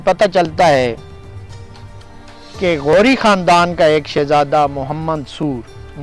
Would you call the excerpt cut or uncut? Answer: uncut